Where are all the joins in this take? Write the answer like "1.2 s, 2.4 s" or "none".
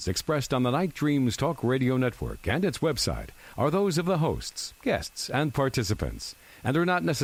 none